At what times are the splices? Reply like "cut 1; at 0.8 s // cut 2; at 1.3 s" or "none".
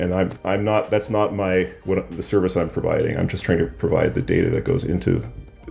none

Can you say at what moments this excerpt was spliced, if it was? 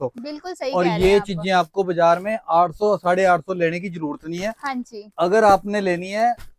none

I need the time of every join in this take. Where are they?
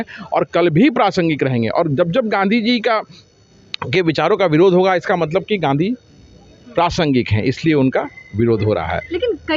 none

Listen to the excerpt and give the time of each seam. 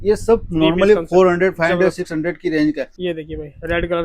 cut 1; at 2.9 s

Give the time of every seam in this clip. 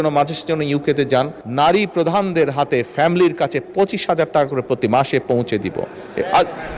cut 1; at 1.4 s

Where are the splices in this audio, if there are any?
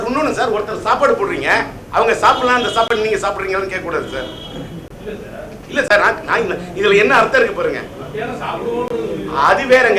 none

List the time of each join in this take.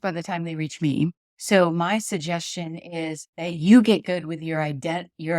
cut 1; at 1.3 s // cut 2; at 3.3 s

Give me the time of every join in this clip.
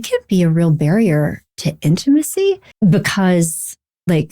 cut 1; at 2.7 s

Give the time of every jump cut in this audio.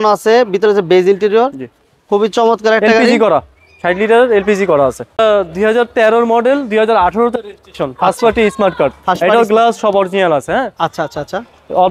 cut 1; at 5.2 s

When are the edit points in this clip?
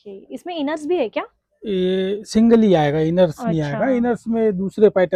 none

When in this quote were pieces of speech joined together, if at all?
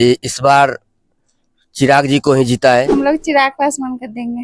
cut 1; at 2.9 s

